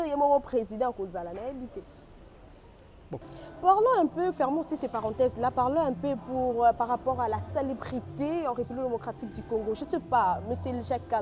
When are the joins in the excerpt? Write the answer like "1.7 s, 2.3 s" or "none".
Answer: 3.1 s

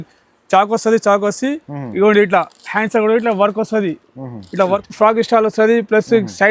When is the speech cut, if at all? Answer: 4.8 s

